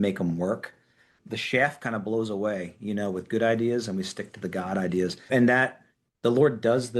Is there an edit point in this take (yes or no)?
yes